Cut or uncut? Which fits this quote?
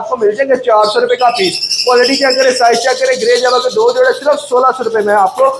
uncut